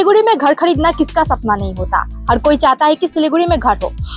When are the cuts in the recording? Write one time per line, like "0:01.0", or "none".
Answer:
none